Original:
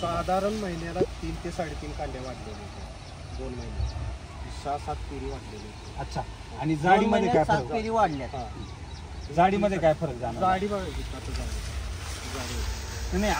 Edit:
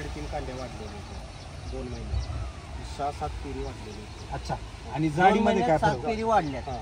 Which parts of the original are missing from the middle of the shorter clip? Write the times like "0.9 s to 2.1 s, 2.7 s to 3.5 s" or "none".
none